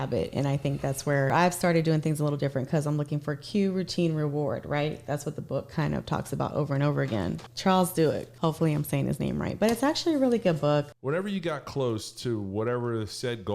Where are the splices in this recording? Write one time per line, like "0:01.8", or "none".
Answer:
0:01.3
0:07.5
0:08.3
0:10.9